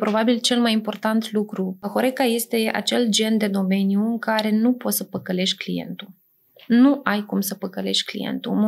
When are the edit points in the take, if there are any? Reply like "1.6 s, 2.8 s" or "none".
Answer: 1.9 s